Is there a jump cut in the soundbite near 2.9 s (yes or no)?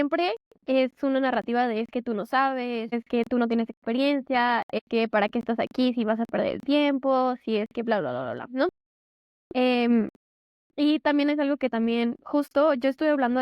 yes